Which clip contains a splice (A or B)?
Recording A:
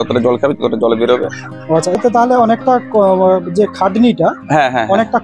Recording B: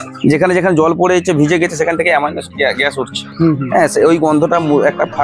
A